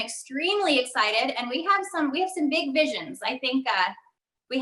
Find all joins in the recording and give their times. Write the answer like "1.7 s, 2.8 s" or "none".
none